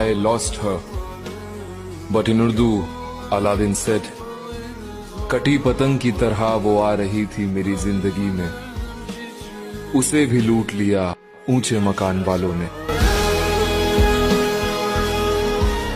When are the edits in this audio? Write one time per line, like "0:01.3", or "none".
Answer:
none

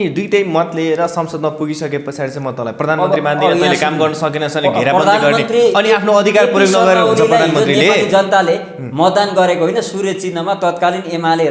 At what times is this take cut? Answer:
none

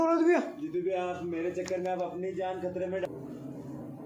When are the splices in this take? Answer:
0:03.1

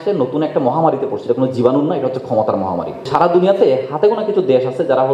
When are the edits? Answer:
0:03.1

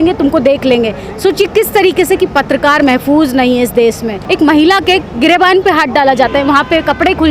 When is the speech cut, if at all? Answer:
0:04.2

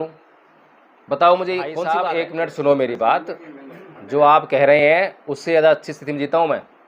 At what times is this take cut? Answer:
0:01.8

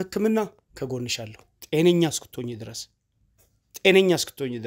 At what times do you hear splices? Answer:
none

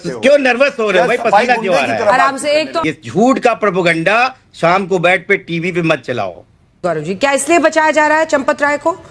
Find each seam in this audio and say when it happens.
0:02.7
0:06.8

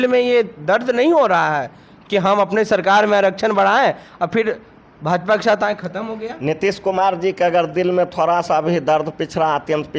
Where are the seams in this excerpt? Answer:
none

